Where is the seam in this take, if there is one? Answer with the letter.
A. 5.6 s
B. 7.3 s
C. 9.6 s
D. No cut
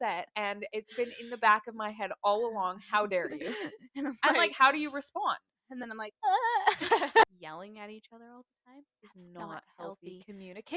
B